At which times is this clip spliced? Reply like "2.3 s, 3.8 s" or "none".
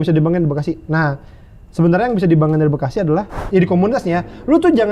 3.4 s